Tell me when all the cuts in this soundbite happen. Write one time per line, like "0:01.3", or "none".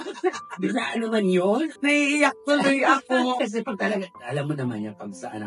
0:01.7
0:03.4